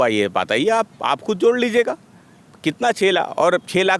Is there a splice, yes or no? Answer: no